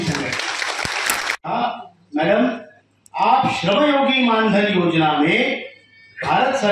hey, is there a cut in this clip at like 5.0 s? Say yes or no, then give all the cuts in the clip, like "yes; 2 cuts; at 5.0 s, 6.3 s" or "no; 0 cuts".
no; 1 cut; at 1.2 s